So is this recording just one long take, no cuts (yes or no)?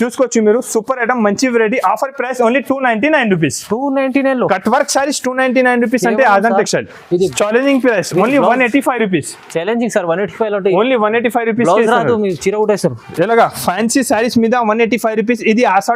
no